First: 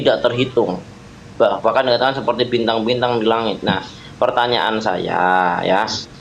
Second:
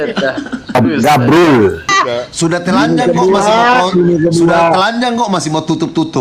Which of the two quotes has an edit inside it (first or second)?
second